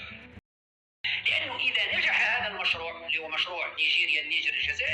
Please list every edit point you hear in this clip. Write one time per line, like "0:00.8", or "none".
0:00.9